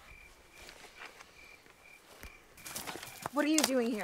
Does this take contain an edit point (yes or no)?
yes